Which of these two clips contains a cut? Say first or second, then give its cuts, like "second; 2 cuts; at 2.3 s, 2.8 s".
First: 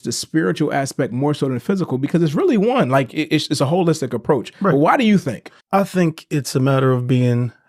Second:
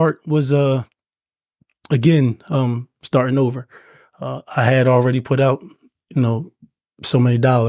first; 1 cut; at 5.5 s